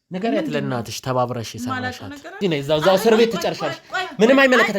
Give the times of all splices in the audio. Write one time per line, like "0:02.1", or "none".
0:02.4